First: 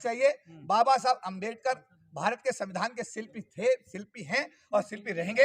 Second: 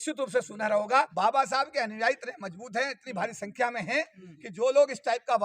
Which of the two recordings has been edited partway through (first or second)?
second